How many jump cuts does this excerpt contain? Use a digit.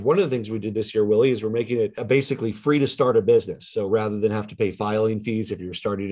1